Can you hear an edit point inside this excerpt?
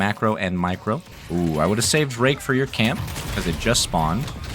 yes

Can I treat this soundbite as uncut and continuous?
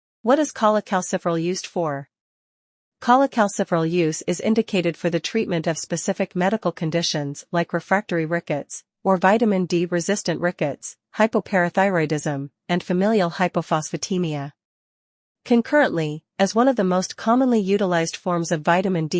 yes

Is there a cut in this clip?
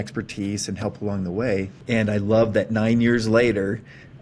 yes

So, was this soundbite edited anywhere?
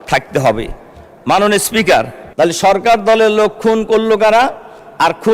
yes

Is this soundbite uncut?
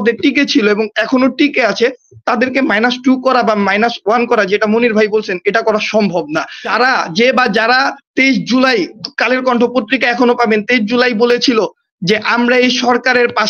no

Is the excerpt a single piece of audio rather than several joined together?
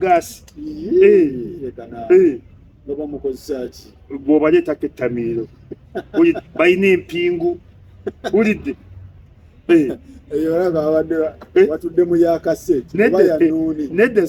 yes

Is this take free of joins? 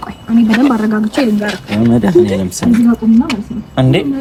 yes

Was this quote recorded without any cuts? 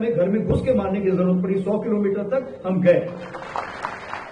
yes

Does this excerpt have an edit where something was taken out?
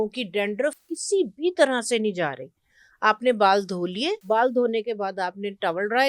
yes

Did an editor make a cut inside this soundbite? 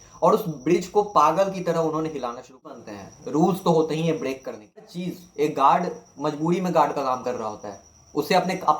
yes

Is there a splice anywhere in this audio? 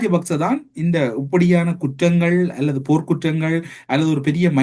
no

